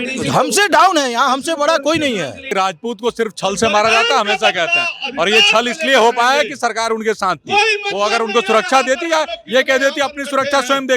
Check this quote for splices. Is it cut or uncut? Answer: cut